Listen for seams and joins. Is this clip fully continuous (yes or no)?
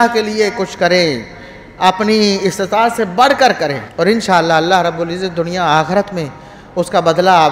no